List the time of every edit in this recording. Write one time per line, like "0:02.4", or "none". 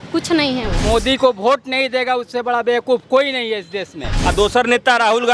0:00.8
0:04.1